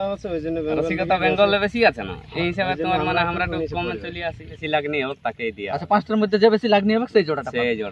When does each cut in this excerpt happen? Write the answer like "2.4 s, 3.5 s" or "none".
4.6 s